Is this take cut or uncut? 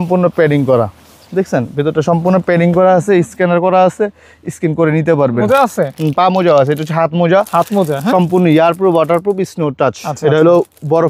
cut